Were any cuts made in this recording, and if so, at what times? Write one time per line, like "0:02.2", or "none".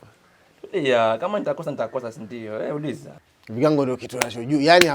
0:03.1